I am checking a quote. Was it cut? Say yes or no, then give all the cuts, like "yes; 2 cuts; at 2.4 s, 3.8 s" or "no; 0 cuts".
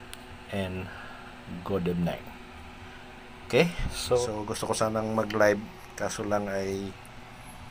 yes; 1 cut; at 4.2 s